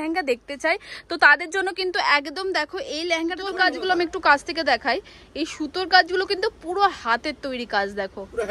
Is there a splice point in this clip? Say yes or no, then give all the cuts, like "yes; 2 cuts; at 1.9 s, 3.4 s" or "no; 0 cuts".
yes; 1 cut; at 3.5 s